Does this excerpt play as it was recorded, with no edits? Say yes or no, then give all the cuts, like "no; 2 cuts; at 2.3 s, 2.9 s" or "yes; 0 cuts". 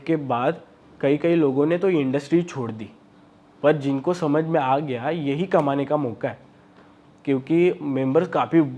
yes; 0 cuts